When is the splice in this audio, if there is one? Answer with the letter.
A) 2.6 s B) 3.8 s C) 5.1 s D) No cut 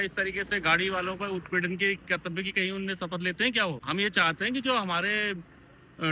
D